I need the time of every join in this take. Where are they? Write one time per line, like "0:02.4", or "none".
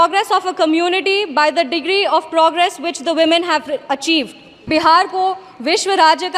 0:04.7